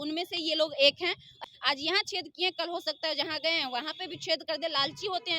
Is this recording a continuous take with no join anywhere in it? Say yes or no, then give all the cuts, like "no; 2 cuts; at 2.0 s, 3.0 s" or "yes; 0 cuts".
no; 1 cut; at 1.4 s